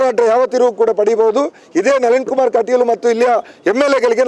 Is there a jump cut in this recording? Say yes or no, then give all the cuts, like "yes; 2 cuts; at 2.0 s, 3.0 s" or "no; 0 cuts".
no; 0 cuts